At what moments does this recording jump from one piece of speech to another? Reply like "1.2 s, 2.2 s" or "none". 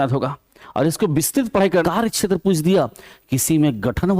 1.8 s